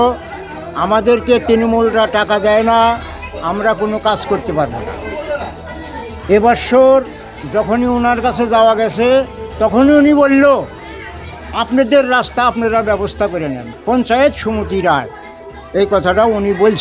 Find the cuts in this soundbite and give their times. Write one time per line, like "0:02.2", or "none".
0:13.6